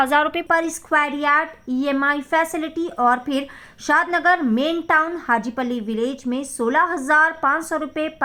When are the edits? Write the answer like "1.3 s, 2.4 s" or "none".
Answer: none